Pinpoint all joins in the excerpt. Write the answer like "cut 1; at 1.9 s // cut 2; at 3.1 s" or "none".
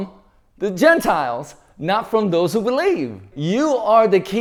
none